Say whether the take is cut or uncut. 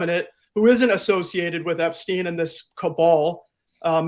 uncut